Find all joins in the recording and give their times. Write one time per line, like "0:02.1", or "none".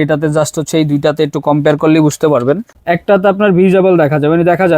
0:02.7